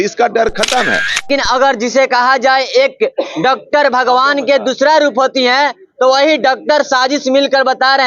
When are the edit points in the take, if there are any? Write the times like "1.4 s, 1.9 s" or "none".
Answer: 1.3 s